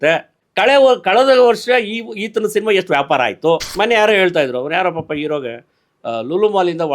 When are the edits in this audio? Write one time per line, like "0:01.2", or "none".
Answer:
0:03.7

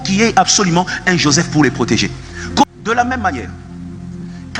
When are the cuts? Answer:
0:02.7

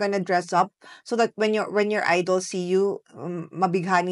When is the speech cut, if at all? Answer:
none

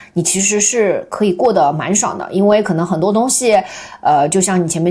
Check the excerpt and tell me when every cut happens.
none

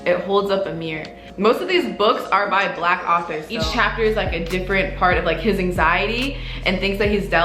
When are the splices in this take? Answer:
0:01.3
0:03.5

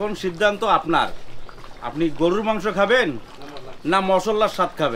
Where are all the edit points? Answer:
none

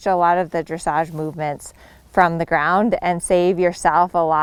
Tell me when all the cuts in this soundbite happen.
none

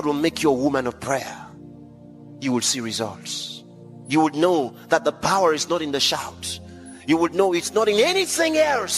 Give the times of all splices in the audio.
0:03.9

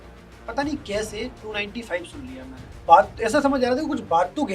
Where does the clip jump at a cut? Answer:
0:02.8

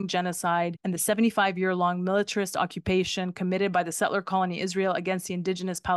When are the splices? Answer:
none

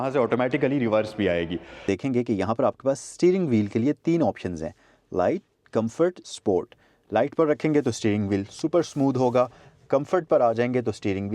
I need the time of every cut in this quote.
0:01.8

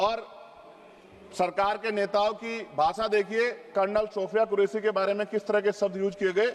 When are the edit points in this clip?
none

